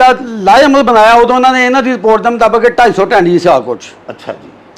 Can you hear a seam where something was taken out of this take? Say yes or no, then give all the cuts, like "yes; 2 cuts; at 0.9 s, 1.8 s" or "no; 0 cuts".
no; 0 cuts